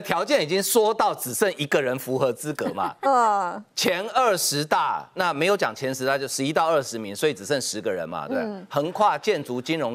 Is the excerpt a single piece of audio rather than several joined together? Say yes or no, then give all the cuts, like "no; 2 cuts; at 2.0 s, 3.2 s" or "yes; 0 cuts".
yes; 0 cuts